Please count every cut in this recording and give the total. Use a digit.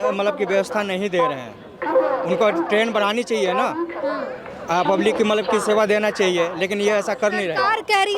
0